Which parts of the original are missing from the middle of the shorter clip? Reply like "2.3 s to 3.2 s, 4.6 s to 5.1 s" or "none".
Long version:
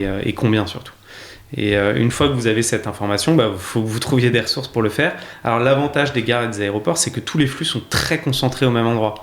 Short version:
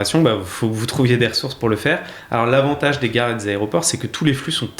none